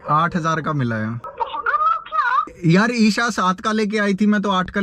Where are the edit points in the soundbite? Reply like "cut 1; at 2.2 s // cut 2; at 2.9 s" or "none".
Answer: cut 1; at 1.3 s // cut 2; at 2.5 s